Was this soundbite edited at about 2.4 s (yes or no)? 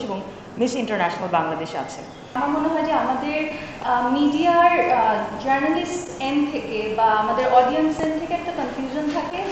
yes